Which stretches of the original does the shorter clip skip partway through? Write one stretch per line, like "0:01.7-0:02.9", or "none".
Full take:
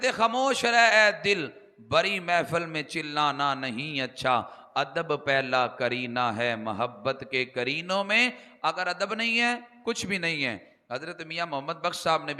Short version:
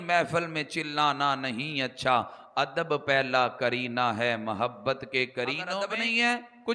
0:07.9-0:08.9